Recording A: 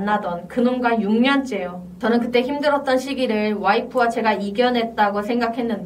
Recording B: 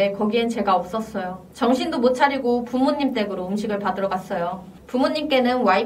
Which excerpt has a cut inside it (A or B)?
B